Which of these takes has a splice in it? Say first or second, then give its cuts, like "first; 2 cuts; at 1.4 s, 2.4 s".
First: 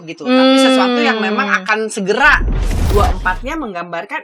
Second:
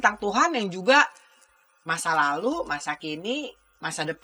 first; 1 cut; at 2.6 s